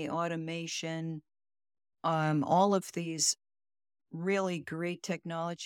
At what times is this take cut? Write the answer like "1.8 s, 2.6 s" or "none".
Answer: none